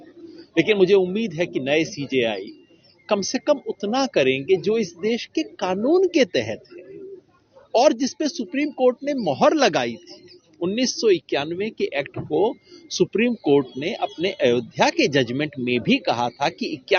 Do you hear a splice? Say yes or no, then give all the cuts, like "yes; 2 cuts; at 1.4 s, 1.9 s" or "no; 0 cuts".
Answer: no; 0 cuts